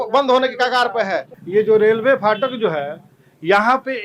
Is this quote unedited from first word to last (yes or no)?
no